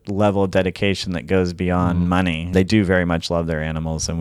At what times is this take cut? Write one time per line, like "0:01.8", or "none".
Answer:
0:02.5